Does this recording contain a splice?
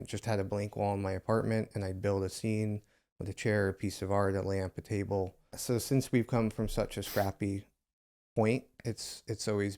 yes; 1 cut; at 5.6 s

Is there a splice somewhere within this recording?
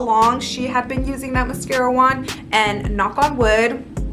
yes; 1 cut; at 2.3 s

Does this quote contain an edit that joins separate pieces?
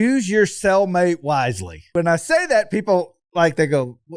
yes; 1 cut; at 1.9 s

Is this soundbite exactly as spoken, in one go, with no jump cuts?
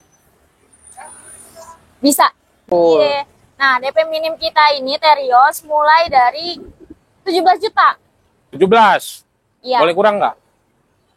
no; 1 cut; at 2.7 s

